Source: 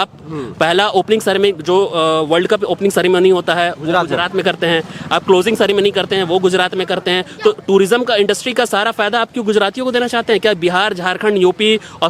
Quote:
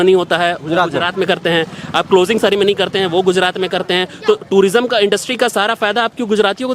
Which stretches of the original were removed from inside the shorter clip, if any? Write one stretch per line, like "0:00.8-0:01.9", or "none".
none